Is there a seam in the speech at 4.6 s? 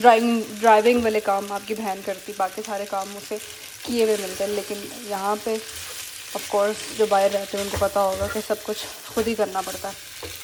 no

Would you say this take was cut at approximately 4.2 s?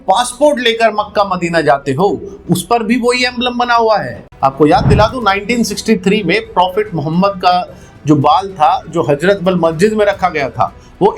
yes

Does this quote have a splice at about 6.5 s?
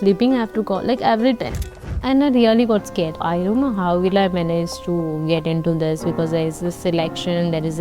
no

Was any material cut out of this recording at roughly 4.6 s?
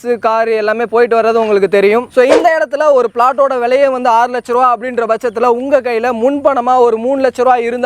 no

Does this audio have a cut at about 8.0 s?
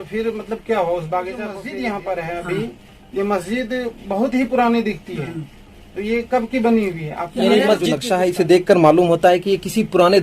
yes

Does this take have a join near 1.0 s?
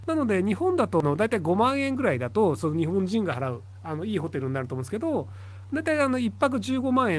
yes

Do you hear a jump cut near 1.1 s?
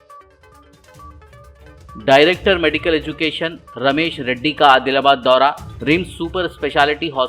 yes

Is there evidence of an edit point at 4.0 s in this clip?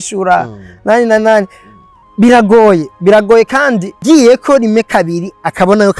yes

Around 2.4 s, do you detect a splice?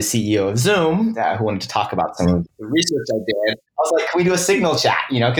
yes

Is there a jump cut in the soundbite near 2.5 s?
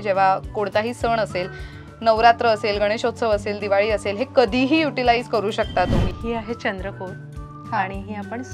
no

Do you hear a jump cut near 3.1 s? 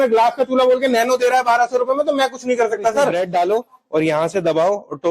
yes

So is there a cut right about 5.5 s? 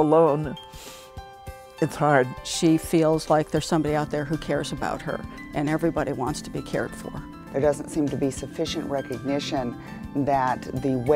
no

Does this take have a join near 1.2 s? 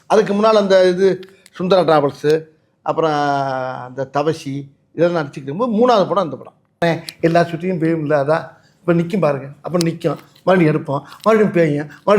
no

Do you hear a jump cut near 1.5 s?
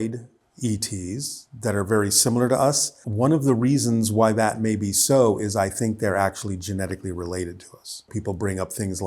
no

